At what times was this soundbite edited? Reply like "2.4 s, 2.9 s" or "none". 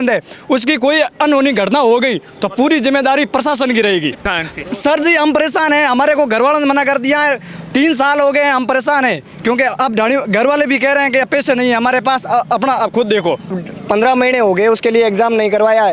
4.2 s, 13.5 s